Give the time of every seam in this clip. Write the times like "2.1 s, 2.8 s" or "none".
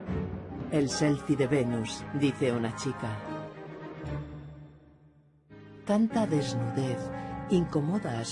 none